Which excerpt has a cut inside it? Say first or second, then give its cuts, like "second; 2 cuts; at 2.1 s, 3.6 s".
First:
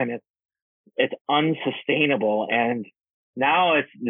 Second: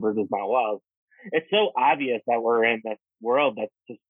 second; 3 cuts; at 1.0 s, 2.2 s, 3.1 s